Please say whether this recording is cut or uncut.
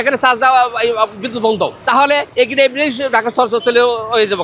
uncut